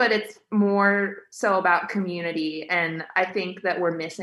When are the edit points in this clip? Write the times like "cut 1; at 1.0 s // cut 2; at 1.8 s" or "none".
none